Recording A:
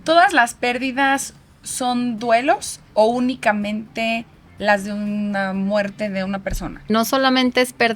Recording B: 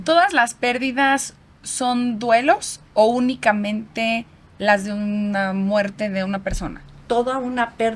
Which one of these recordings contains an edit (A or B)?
A